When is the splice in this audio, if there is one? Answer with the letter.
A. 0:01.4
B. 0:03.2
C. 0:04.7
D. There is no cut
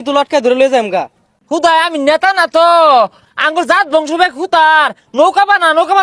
A